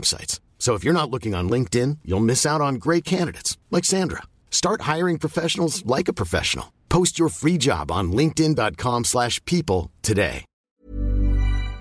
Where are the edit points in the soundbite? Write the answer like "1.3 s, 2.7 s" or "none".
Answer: 10.5 s